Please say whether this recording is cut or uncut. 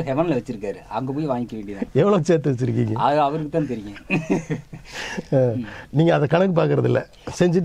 uncut